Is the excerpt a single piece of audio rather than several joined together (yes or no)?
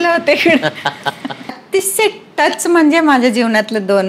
no